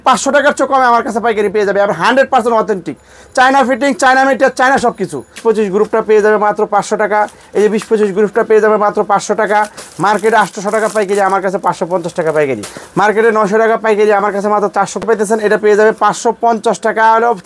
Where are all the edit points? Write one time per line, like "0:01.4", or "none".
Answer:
0:05.4
0:15.0